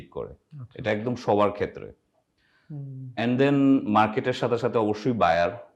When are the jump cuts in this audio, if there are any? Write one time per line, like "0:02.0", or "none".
none

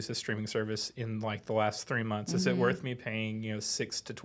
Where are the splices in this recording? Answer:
none

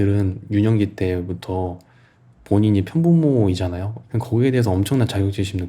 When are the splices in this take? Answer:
none

